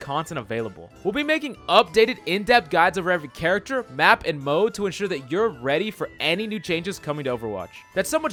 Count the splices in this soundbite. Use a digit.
0